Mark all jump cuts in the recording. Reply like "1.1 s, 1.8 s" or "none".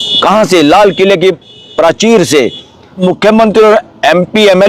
3.0 s